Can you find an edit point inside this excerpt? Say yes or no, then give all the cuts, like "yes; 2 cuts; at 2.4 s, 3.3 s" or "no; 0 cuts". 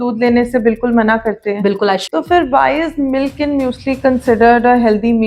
yes; 1 cut; at 2.0 s